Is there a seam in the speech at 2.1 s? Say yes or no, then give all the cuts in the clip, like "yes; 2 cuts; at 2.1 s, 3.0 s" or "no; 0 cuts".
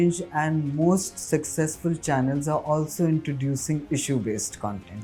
no; 0 cuts